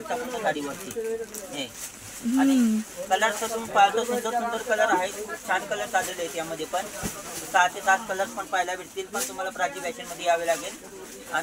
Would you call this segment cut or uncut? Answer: uncut